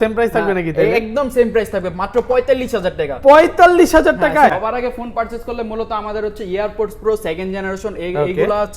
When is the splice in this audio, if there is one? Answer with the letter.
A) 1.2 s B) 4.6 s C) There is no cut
B